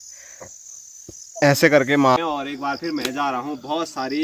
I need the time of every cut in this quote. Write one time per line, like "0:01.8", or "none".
0:02.2